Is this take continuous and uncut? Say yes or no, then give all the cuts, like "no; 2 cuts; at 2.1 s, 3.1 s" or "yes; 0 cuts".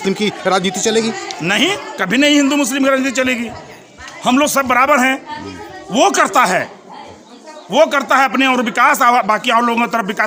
yes; 0 cuts